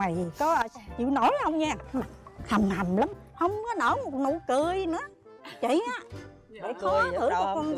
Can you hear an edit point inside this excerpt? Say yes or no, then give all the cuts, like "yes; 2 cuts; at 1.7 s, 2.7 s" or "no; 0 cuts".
no; 0 cuts